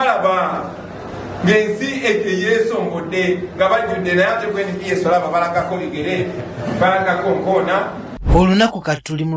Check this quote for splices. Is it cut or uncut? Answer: cut